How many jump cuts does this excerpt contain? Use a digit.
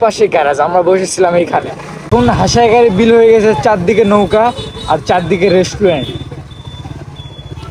1